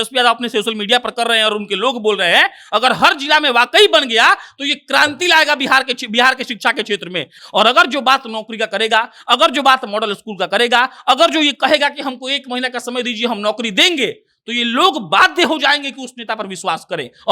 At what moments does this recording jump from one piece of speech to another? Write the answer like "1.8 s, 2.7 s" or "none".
7.4 s